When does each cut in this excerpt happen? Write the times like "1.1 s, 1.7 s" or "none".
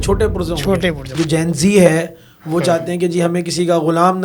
1.1 s